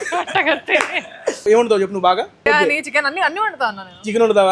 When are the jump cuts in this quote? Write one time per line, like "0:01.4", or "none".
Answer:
0:01.4
0:02.5